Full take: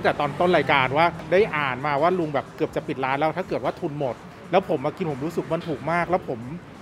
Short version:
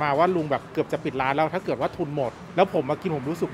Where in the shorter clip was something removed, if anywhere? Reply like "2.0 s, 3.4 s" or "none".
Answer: 2.4 s